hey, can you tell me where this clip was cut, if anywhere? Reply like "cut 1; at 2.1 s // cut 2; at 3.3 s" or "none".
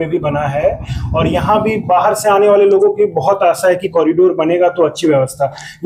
none